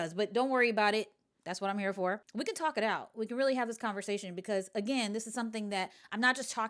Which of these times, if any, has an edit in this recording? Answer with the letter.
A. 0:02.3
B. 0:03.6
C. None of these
A